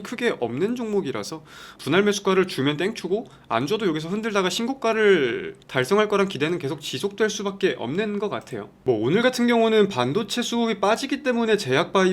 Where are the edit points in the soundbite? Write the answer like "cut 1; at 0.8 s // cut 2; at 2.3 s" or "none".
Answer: cut 1; at 8.7 s